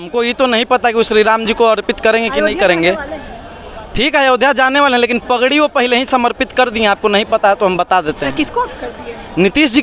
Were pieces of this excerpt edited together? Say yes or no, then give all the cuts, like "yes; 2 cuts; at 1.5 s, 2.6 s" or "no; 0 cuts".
no; 0 cuts